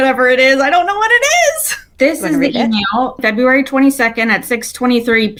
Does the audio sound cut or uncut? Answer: uncut